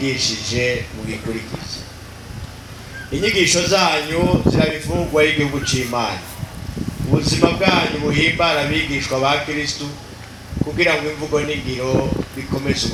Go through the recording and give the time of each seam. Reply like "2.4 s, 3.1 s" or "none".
none